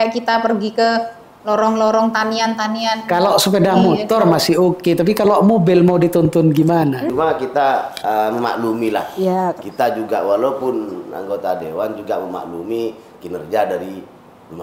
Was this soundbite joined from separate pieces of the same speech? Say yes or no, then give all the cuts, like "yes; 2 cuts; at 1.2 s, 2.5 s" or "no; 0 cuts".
yes; 1 cut; at 7.1 s